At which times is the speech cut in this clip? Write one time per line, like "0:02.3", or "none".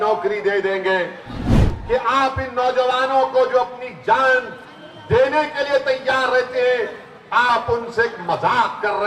0:01.5